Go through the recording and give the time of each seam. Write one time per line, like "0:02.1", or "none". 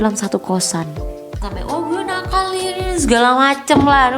0:01.5